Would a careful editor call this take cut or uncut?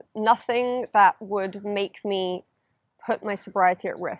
uncut